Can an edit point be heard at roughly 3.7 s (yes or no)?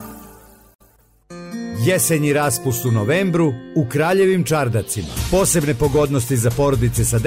no